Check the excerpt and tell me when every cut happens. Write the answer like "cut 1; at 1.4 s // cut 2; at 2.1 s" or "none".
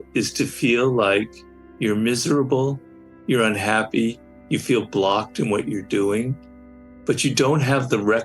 none